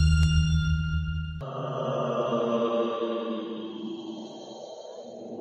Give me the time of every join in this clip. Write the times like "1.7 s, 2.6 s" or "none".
1.4 s